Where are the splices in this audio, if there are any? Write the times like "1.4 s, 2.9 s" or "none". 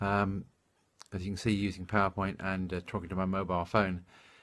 none